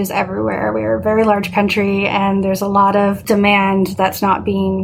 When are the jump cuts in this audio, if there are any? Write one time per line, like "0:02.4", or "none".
0:03.2